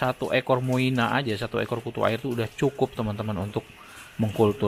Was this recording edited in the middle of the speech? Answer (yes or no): no